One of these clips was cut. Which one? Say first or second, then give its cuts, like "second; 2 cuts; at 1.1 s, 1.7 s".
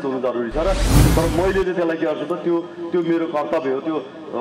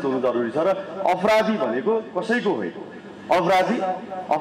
first; 1 cut; at 1.0 s